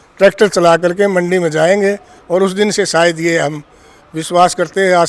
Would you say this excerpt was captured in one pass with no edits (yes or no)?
yes